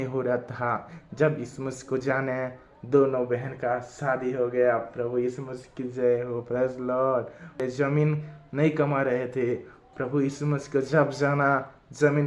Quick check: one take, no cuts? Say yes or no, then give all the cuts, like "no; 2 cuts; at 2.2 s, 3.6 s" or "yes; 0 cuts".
no; 1 cut; at 7.6 s